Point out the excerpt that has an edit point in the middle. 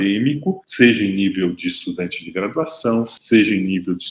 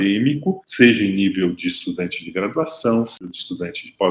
second; 1 cut; at 3.2 s

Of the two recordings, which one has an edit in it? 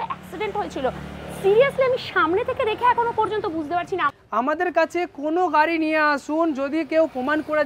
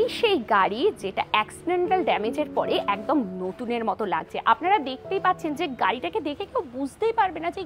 first; 1 cut; at 4.1 s

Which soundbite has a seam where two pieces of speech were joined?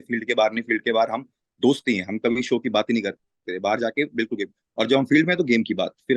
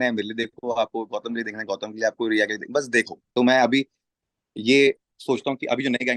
second; 1 cut; at 3.3 s

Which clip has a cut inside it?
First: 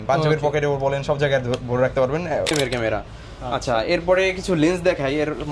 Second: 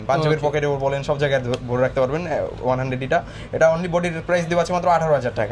first; 1 cut; at 2.5 s

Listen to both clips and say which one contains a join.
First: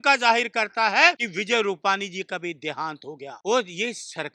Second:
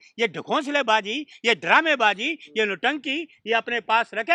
first; 2 cuts; at 1.3 s, 3.3 s

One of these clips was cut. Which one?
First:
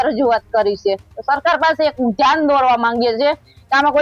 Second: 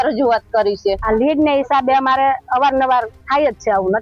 second; 1 cut; at 1.0 s

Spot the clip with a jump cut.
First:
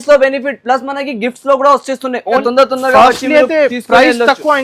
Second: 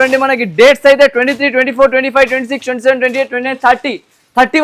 first; 1 cut; at 2.4 s

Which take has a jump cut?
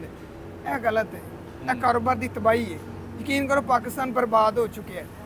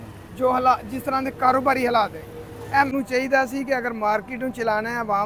second; 1 cut; at 2.9 s

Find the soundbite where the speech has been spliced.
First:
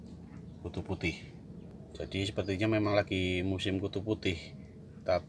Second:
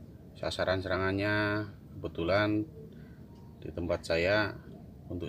first; 1 cut; at 1.8 s

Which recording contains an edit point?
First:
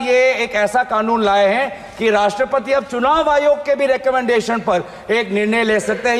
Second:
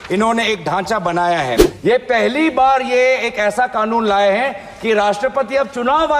second; 1 cut; at 1.7 s

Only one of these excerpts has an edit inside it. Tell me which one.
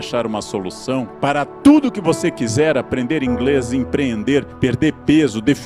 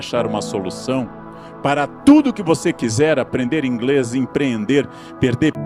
first; 2 cuts; at 1.1 s, 4.5 s

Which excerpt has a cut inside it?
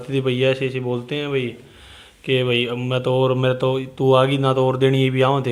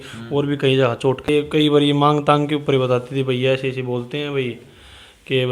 second; 1 cut; at 1.3 s

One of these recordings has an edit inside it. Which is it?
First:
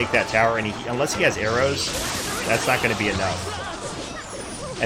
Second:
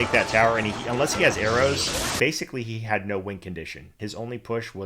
second; 2 cuts; at 2.1 s, 3.9 s

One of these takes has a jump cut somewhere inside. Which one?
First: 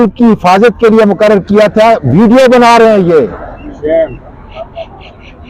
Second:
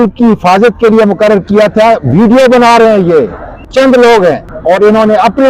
second; 2 cuts; at 3.7 s, 4.5 s

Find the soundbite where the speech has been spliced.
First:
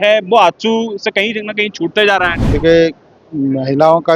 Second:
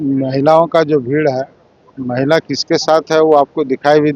first; 1 cut; at 2.4 s

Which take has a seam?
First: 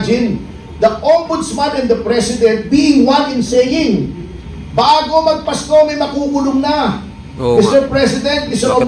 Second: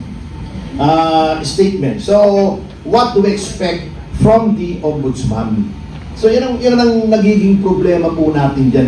second; 1 cut; at 2.0 s

